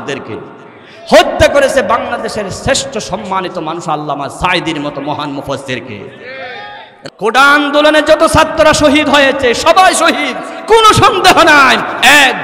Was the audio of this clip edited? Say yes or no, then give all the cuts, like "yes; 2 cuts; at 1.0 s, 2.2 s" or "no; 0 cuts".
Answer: yes; 1 cut; at 6.9 s